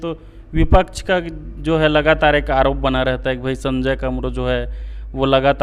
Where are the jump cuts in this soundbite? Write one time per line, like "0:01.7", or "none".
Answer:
none